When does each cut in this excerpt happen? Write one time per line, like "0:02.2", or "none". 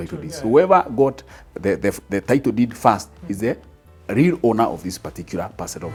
none